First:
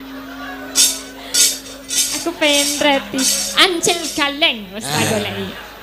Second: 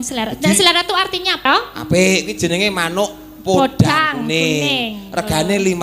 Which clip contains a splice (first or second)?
second